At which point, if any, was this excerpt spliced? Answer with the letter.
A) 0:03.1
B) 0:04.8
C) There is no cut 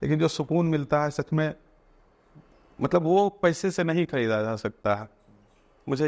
C